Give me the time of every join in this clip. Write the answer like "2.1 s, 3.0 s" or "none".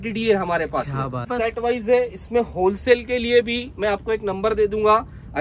1.3 s